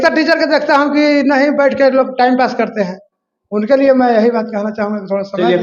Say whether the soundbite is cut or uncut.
uncut